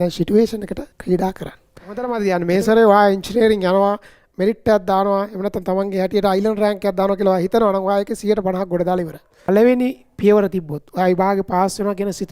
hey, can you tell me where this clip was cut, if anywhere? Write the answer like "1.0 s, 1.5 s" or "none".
0.9 s, 2.1 s, 9.3 s